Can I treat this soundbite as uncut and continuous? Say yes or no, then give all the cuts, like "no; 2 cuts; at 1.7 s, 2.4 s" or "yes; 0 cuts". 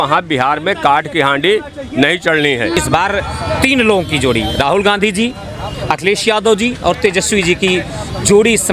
no; 1 cut; at 2.8 s